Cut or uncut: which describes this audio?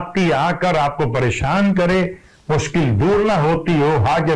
uncut